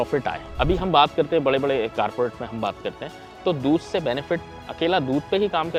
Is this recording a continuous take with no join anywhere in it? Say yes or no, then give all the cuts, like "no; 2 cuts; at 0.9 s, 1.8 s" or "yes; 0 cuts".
yes; 0 cuts